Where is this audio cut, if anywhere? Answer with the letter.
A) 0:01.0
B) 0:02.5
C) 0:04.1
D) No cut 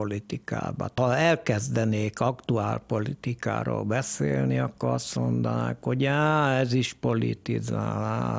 A